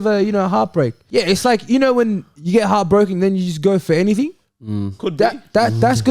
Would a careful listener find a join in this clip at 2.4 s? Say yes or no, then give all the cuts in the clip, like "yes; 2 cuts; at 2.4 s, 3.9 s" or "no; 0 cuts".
no; 1 cut; at 1.0 s